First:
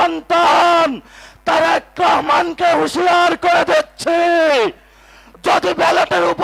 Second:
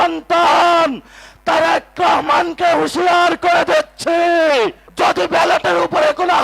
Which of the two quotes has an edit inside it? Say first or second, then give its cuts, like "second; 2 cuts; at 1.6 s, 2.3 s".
second; 1 cut; at 4.8 s